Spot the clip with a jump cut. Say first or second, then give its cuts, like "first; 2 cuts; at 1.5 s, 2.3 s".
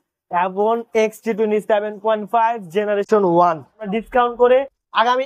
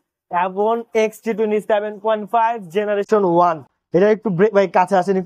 first; 1 cut; at 3.9 s